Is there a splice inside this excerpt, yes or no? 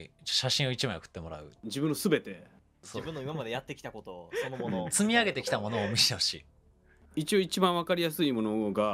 yes